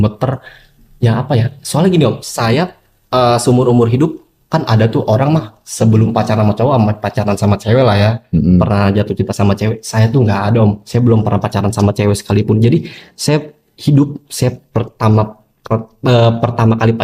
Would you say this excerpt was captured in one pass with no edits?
yes; 0 cuts

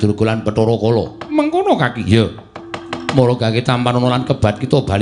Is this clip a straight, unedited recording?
yes; 0 cuts

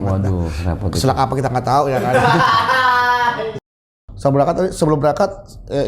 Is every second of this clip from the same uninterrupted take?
no; 1 cut; at 3.6 s

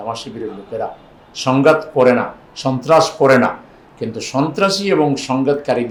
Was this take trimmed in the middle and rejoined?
no; 0 cuts

